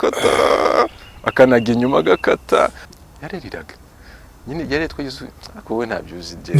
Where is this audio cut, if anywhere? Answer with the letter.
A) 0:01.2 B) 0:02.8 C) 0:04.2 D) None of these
B